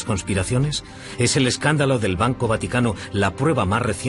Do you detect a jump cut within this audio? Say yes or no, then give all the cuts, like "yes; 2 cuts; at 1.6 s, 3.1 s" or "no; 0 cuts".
no; 0 cuts